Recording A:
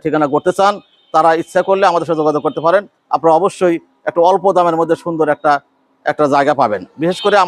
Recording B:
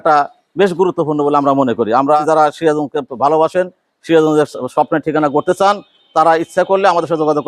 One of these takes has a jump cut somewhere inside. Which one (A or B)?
B